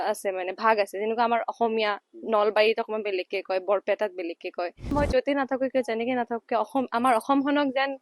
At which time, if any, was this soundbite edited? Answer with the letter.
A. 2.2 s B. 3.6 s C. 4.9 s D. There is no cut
C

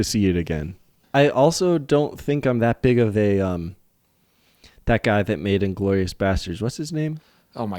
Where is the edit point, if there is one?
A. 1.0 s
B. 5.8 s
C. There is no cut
A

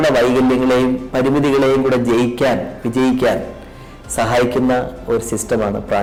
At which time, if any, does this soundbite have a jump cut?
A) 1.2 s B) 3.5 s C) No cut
C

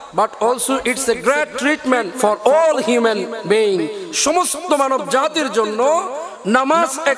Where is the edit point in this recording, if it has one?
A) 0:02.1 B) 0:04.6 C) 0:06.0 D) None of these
A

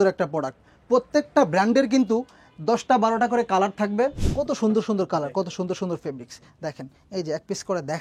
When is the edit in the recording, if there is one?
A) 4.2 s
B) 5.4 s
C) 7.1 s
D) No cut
A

